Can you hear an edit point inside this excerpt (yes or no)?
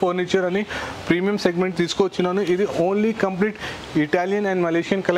no